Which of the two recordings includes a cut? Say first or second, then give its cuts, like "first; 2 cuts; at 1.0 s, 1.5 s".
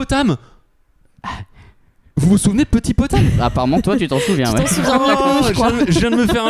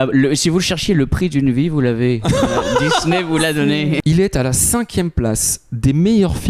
second; 1 cut; at 4.0 s